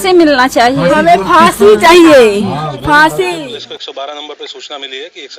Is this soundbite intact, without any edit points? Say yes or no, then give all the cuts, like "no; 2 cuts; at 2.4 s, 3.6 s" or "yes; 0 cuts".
no; 1 cut; at 3.4 s